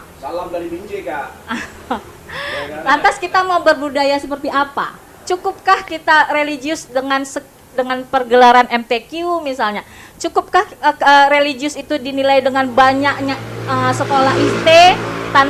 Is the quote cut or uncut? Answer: uncut